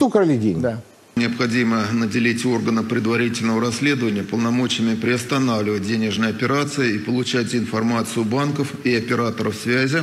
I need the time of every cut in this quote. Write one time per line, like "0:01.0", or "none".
0:01.1